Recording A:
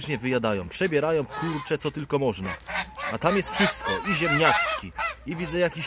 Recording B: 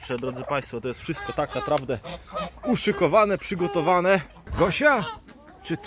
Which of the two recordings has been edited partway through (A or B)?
B